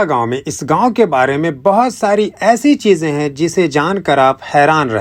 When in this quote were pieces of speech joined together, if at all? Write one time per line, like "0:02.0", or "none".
none